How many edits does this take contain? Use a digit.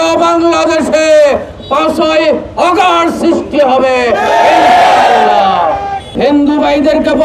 1